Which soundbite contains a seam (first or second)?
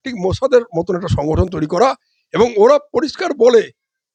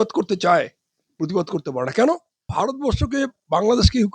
second